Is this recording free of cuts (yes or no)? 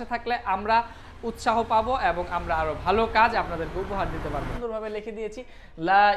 no